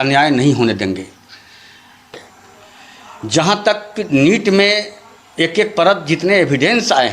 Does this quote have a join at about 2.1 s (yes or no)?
yes